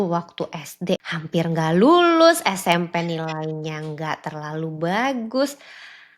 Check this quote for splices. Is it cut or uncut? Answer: cut